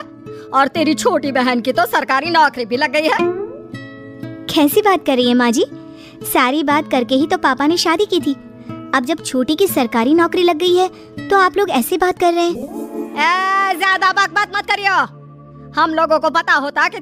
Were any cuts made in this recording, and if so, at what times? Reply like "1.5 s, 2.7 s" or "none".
none